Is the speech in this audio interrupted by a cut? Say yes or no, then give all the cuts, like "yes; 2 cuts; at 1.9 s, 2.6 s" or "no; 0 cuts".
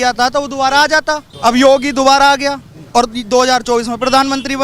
yes; 1 cut; at 1.2 s